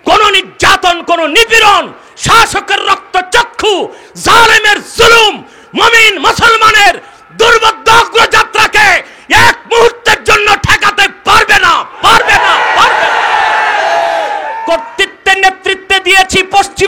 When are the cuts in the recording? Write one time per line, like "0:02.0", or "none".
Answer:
0:14.6